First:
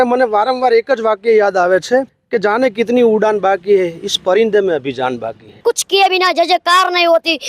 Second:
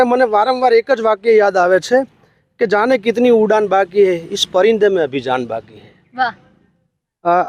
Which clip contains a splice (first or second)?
first